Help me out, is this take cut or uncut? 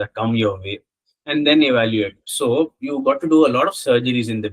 cut